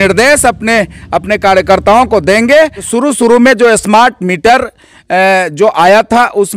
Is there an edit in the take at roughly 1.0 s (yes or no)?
no